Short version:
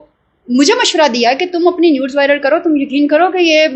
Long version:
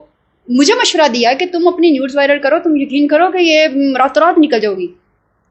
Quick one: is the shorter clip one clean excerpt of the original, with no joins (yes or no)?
yes